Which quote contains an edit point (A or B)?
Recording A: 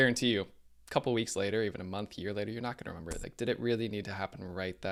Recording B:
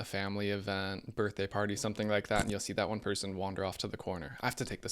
B